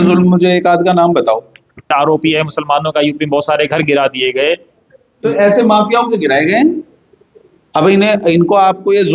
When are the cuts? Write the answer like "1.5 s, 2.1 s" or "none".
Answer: 1.9 s